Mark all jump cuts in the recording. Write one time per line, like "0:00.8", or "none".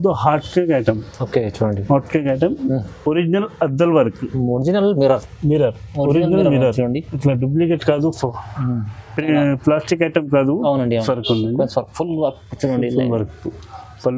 0:11.0